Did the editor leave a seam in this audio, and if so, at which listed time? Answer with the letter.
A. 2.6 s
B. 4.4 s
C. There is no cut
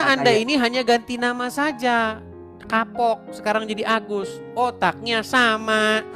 C